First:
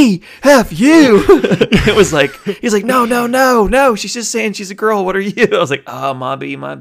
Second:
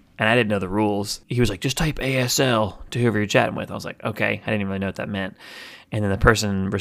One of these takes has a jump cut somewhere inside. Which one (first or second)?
second